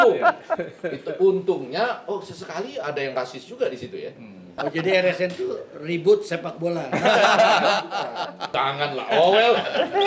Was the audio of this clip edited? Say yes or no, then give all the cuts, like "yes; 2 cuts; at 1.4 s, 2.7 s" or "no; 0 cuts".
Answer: yes; 2 cuts; at 4.5 s, 8.4 s